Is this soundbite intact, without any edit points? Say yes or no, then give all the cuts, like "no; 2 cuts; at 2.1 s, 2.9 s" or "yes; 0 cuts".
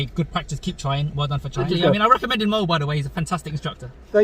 no; 1 cut; at 1.7 s